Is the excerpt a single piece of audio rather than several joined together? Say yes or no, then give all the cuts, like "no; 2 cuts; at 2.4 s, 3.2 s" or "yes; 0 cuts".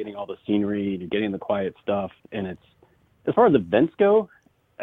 yes; 0 cuts